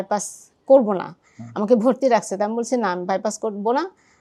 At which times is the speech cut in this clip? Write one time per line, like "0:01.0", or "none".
none